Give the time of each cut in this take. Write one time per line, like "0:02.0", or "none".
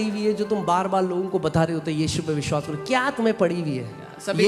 none

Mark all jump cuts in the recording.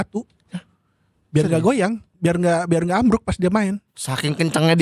none

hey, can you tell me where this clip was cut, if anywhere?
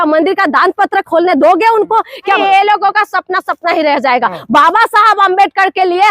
0:02.4

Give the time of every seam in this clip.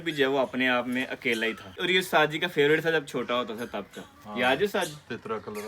0:01.8

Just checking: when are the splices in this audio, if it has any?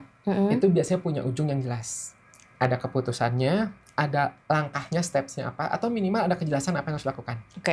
none

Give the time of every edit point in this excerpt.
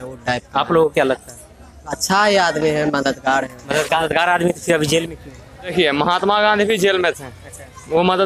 0:03.9
0:05.7

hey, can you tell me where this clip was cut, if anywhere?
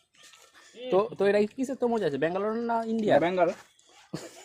none

